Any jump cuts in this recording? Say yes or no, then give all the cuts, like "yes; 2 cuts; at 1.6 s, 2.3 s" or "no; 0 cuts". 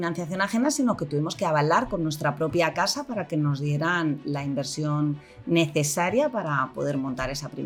no; 0 cuts